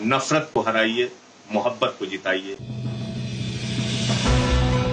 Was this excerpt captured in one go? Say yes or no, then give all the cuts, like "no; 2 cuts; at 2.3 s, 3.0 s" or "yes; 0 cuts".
yes; 0 cuts